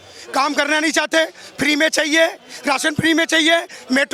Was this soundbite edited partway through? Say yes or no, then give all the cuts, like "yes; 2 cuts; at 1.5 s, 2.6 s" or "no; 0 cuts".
no; 0 cuts